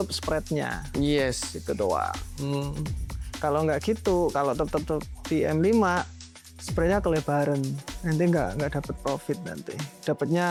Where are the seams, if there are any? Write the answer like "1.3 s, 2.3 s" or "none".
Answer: none

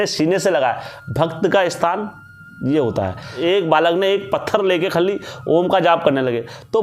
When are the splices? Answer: 3.4 s

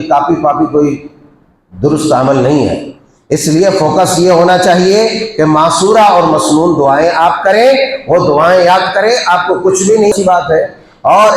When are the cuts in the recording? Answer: 10.1 s

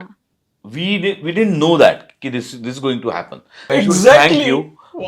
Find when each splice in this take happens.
3.7 s

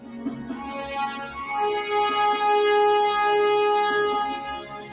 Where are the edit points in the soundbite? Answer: none

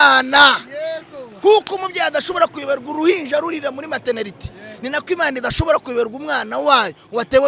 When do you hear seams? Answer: none

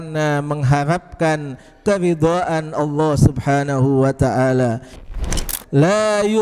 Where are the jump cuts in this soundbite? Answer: 5.2 s

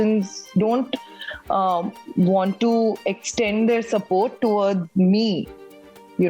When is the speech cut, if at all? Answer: none

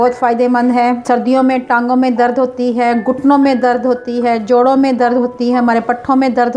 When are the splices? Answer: 1.0 s

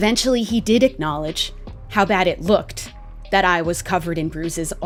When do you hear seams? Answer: none

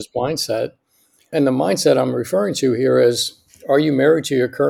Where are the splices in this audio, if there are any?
1.3 s

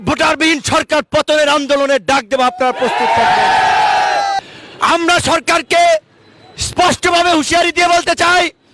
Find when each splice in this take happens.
4.4 s

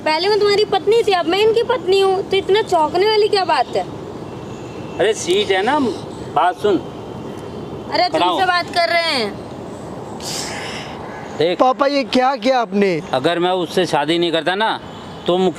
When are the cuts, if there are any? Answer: none

